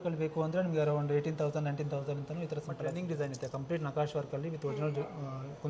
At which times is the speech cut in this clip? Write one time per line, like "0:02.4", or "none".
0:03.0